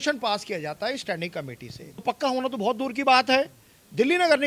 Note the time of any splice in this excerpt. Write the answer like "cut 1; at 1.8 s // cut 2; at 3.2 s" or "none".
cut 1; at 2.0 s